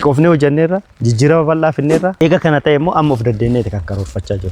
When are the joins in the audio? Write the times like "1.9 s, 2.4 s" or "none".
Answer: 2.1 s